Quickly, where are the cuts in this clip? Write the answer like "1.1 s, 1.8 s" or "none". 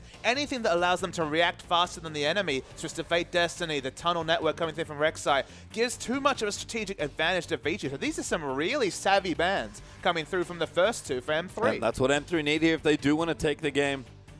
13.2 s